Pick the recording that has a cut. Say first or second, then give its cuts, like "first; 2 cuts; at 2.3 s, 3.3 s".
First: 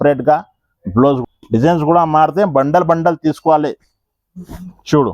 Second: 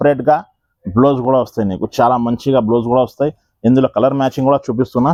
first; 1 cut; at 1.2 s